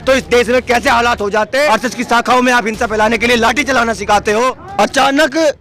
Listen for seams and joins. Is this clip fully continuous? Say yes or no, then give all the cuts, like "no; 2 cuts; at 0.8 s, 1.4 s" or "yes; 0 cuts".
no; 2 cuts; at 1.7 s, 4.6 s